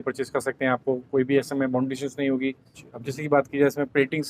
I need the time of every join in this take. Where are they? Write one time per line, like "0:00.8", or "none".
0:02.9